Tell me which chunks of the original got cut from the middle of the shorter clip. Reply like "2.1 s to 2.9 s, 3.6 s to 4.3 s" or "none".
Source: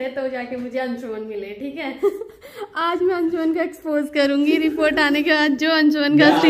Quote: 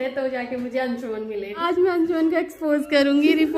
1.6 s to 2.8 s